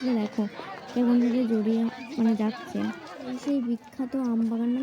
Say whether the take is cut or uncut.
cut